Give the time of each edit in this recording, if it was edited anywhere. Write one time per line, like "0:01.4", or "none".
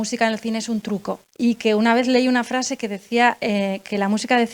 0:01.3